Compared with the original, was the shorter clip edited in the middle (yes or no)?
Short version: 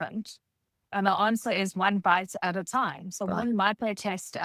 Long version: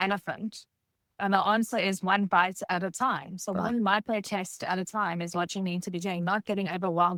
no